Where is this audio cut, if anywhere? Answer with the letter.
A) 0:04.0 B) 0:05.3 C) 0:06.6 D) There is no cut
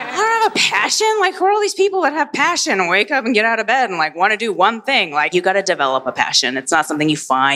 B